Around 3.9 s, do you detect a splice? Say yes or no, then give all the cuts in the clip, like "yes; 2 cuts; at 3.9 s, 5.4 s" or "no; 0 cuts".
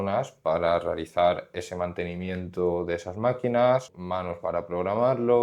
yes; 1 cut; at 3.9 s